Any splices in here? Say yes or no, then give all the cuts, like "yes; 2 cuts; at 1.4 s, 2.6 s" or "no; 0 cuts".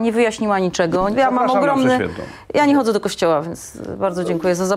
yes; 1 cut; at 1.1 s